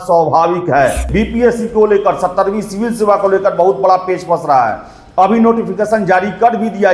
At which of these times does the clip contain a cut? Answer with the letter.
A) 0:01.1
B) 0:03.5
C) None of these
A